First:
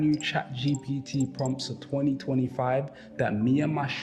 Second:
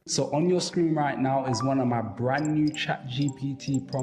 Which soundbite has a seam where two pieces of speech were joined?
first; 1 cut; at 2.8 s

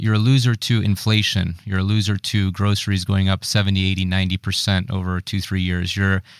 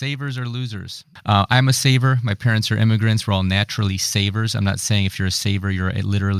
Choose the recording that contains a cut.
second; 1 cut; at 1.1 s

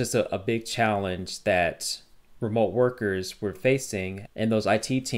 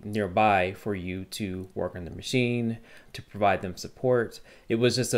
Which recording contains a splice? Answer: first; 1 cut; at 3.6 s

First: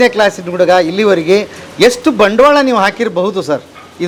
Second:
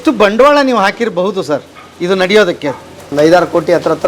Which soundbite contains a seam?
second; 1 cut; at 3.1 s

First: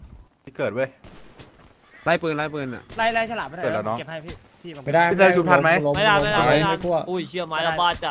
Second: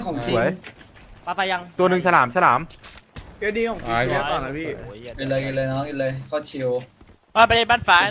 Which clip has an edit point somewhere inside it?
second; 1 cut; at 1.7 s

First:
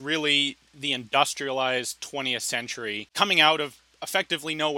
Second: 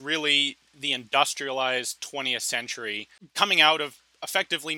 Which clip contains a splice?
first; 1 cut; at 3.0 s

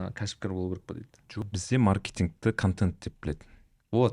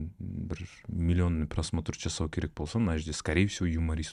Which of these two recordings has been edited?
first; 1 cut; at 1.4 s

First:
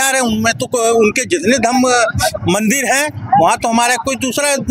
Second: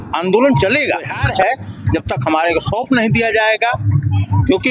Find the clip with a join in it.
second; 1 cut; at 1.2 s

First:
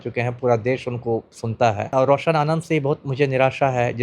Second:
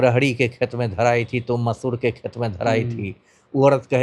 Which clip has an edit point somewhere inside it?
first; 1 cut; at 1.9 s

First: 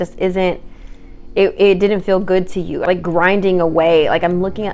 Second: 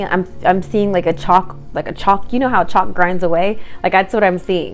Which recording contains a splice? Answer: first; 1 cut; at 2.8 s

